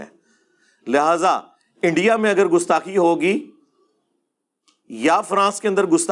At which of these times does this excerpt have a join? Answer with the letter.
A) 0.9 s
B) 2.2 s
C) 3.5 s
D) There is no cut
D